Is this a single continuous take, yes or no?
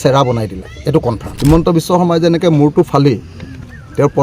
no